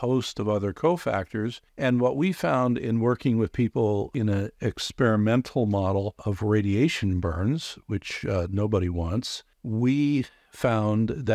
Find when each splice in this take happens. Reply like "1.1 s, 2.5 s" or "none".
4.1 s, 6.3 s

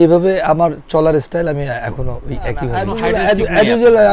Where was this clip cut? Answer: 2.9 s

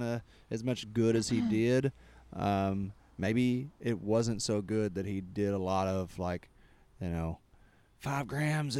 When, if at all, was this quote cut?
none

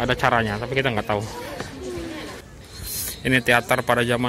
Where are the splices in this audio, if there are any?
2.5 s

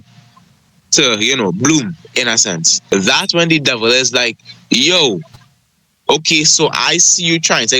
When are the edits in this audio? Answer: 2.9 s

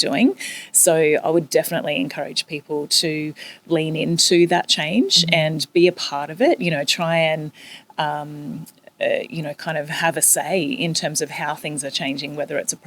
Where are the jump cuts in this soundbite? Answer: none

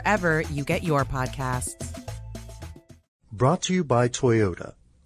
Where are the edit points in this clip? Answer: 3.2 s

